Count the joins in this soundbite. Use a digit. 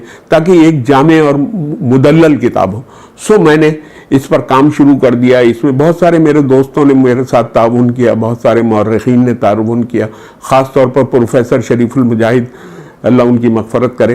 0